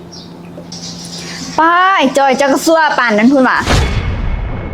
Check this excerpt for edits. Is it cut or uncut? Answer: cut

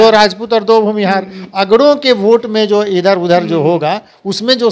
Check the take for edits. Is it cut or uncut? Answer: uncut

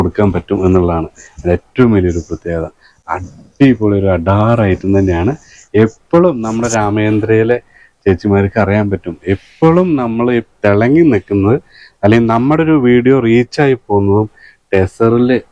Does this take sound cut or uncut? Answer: uncut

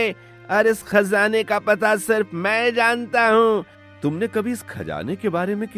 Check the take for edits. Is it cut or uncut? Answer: cut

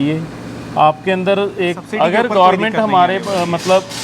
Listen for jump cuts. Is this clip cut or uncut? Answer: cut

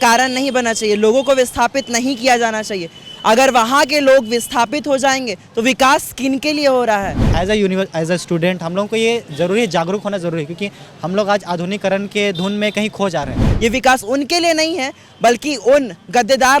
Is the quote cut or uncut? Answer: cut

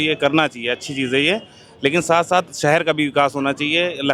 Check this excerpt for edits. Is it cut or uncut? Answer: uncut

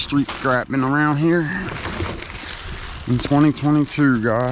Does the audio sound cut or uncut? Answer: uncut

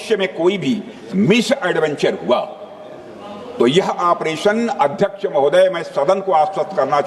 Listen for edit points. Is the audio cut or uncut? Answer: uncut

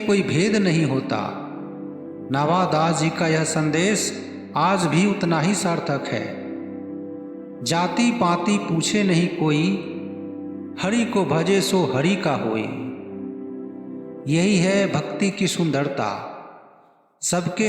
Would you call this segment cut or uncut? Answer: cut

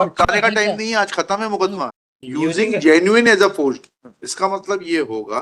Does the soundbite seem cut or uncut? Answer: cut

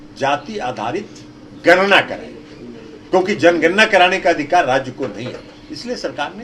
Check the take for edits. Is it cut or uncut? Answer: uncut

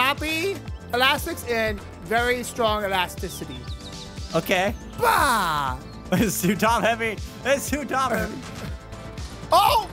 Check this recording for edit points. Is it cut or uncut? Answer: cut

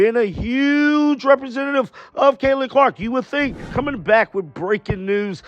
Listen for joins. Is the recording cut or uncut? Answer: cut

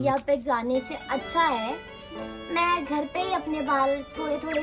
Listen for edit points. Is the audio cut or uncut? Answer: uncut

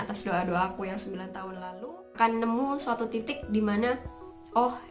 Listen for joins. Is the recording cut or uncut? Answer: cut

